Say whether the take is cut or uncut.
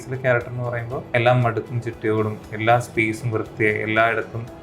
cut